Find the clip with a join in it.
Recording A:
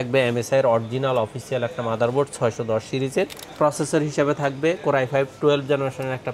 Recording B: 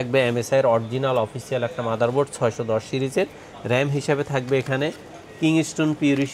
A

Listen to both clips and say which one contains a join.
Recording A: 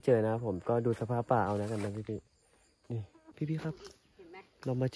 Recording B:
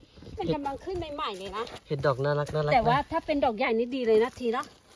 A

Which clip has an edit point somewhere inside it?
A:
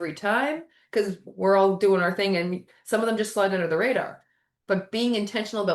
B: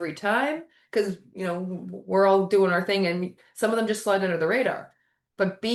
A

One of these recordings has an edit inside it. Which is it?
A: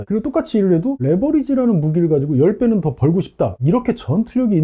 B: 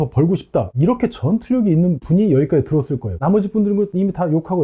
B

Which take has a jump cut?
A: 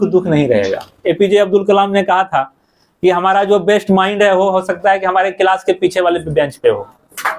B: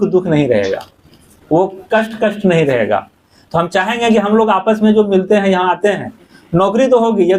A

